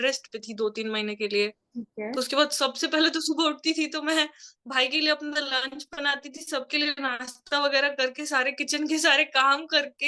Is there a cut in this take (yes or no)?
no